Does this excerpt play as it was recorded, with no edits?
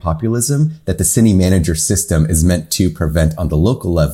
yes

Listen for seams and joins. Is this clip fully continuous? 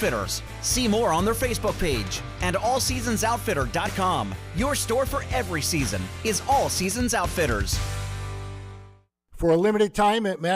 no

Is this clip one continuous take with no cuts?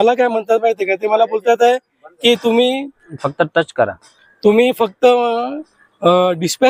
yes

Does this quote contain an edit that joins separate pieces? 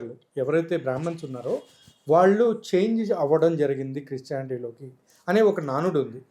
no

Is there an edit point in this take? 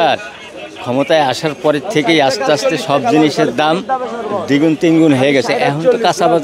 no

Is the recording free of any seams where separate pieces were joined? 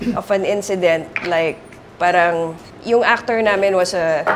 yes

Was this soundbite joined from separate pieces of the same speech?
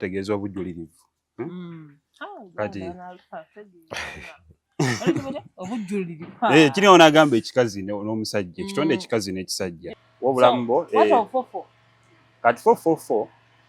yes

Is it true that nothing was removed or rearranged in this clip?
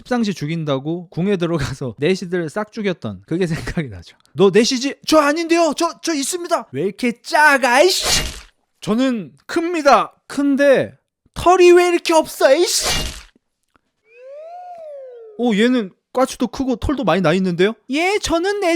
no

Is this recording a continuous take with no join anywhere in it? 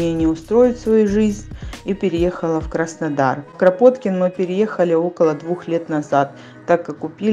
yes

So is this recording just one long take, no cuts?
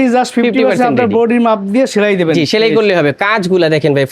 yes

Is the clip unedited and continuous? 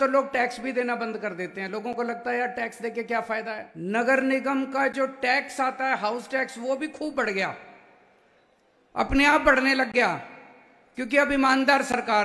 no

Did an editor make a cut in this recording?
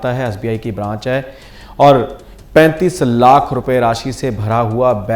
yes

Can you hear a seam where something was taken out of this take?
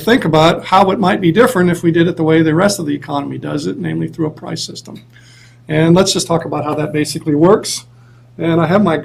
no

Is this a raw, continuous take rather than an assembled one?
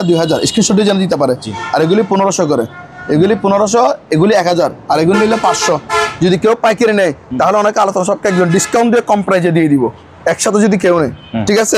yes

